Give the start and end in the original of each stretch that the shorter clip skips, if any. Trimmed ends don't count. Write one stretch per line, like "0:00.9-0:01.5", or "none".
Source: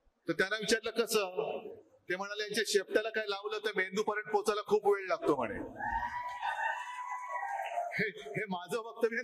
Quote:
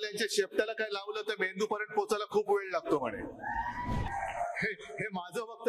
0:06.4-0:07.4